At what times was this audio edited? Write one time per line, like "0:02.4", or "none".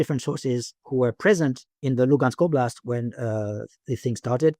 0:01.8